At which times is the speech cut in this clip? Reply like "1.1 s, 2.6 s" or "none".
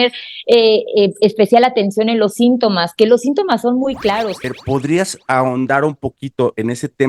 4.6 s